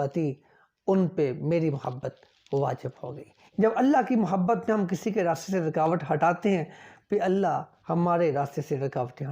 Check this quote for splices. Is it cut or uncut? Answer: cut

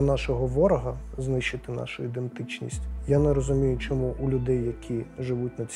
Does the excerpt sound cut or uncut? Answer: cut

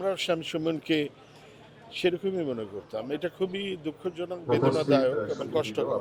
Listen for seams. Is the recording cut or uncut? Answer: uncut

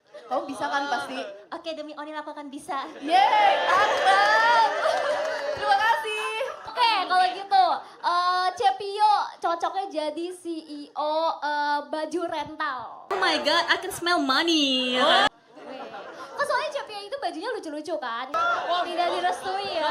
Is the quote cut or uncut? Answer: cut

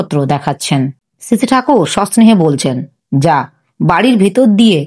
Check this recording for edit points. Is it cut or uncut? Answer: cut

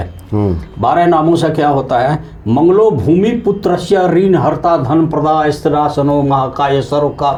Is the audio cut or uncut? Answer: uncut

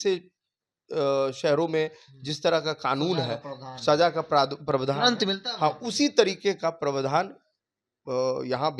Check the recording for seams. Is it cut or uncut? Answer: uncut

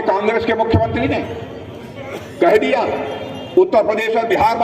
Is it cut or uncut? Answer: uncut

